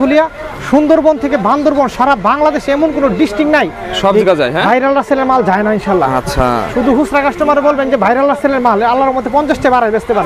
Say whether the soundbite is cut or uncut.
uncut